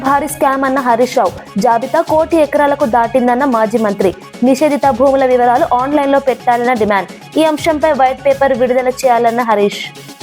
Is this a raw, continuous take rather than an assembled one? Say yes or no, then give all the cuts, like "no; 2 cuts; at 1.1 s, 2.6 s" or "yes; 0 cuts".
yes; 0 cuts